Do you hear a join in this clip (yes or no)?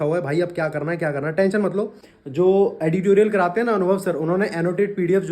yes